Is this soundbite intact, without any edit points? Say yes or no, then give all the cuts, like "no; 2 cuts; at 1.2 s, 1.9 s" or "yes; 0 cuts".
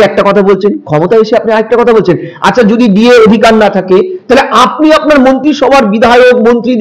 yes; 0 cuts